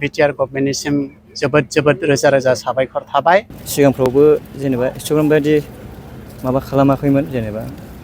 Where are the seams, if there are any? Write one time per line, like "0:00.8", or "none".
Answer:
0:03.6